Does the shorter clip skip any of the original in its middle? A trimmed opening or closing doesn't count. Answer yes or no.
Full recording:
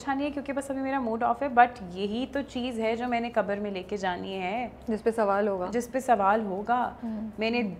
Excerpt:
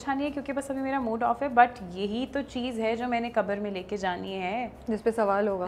no